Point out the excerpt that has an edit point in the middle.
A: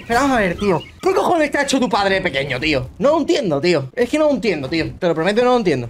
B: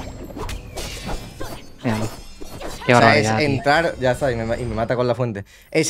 A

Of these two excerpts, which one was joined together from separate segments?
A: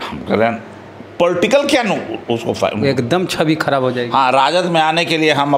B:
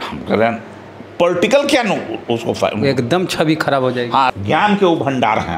B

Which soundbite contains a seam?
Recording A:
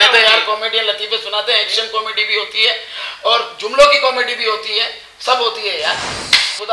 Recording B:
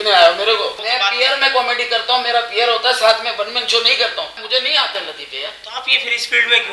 B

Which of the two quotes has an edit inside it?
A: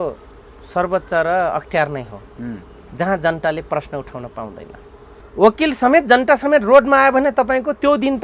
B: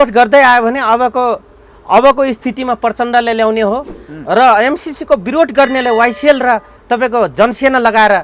A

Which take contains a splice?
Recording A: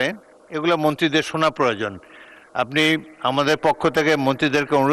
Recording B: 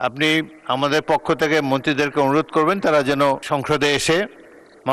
B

